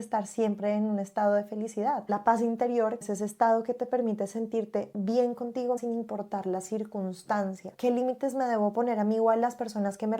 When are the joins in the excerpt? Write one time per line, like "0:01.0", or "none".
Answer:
0:02.1
0:03.0
0:05.8
0:07.7